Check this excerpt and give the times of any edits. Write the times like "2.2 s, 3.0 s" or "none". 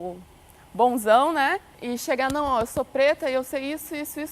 1.7 s